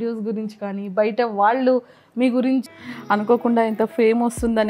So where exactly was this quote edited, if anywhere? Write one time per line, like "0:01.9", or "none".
0:02.8